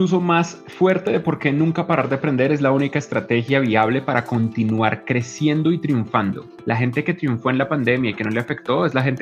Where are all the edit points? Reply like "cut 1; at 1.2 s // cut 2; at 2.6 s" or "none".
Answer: cut 1; at 6.5 s